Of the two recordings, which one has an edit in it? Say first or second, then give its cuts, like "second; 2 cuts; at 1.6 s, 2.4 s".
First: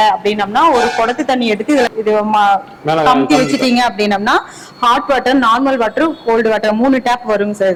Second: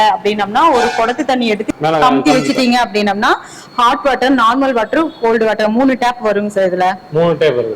second; 1 cut; at 1.6 s